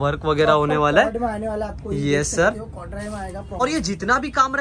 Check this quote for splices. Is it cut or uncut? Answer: cut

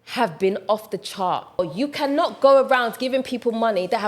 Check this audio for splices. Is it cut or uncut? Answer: cut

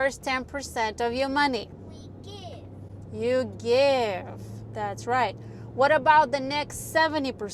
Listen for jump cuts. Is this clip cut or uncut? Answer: uncut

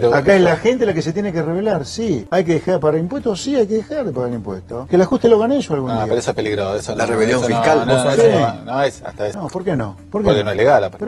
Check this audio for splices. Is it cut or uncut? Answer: uncut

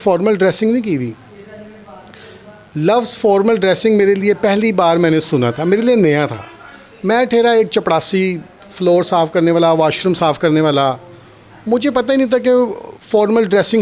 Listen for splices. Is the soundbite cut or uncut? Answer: uncut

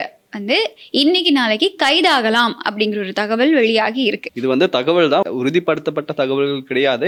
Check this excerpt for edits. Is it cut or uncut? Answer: uncut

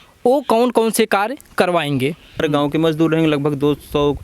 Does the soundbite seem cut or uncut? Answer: cut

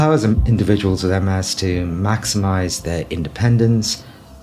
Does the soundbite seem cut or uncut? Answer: uncut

